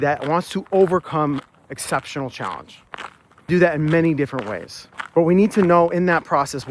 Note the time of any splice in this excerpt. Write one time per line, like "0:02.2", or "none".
0:03.5

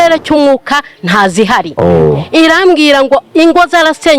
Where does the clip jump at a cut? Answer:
none

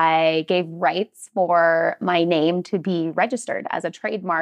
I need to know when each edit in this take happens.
none

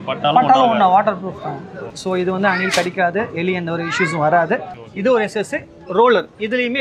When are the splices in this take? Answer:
0:01.9
0:04.8

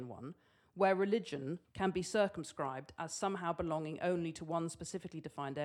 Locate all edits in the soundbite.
0:01.6

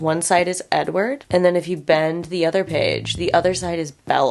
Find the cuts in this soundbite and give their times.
none

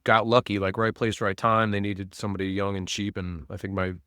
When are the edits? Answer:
none

